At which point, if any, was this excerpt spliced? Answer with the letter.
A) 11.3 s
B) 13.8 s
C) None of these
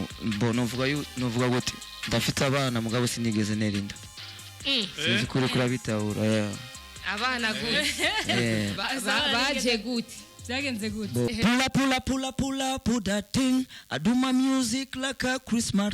A